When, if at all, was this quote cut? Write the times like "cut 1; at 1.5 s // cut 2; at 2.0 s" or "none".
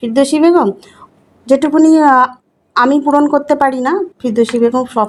none